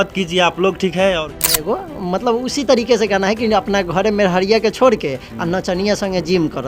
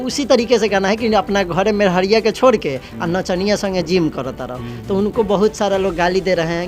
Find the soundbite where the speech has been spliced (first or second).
first